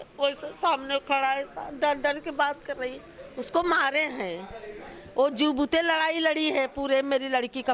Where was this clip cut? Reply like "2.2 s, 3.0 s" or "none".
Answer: none